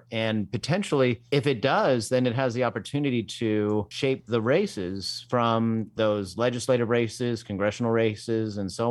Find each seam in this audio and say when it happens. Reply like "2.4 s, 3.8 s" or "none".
1.2 s, 3.9 s, 5.9 s